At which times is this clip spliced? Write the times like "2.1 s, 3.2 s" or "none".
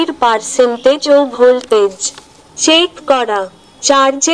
none